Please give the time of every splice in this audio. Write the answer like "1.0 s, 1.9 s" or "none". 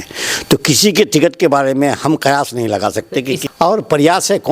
3.4 s

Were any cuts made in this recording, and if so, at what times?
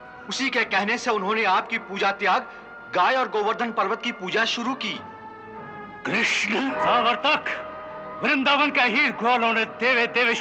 6.8 s

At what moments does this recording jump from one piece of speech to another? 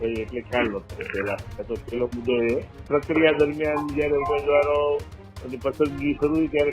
2.7 s

